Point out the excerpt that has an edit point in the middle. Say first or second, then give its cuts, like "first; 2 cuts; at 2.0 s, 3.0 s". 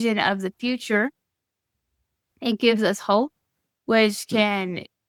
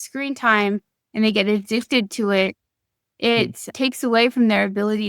second; 1 cut; at 3.7 s